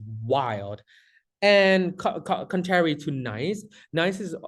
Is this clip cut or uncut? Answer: uncut